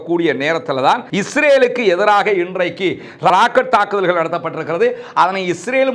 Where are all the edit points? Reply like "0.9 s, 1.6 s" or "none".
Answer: 1.1 s